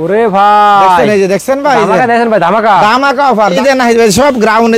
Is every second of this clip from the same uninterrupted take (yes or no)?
no